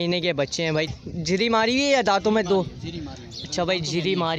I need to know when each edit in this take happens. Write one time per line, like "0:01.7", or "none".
0:01.0